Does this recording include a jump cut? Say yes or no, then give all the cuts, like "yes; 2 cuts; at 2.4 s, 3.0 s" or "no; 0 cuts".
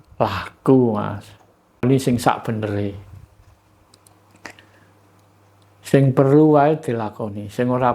yes; 1 cut; at 1.8 s